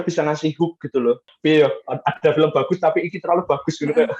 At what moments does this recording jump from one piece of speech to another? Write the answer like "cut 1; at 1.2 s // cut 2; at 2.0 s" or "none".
cut 1; at 1.3 s